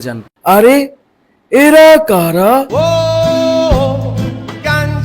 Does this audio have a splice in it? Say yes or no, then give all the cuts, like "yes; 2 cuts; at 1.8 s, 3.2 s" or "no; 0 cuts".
yes; 1 cut; at 2.7 s